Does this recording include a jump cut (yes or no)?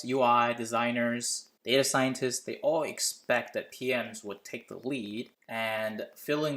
no